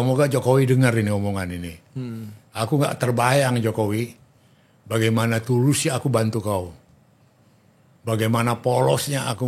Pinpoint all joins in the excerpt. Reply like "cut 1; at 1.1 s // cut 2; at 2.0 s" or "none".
none